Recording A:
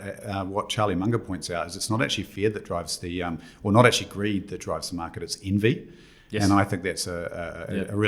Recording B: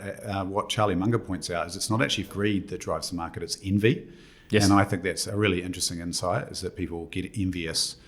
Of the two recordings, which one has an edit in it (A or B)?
B